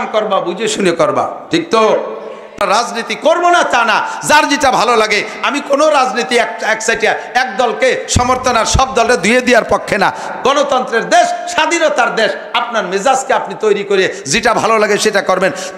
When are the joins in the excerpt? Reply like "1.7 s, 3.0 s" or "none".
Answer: 2.6 s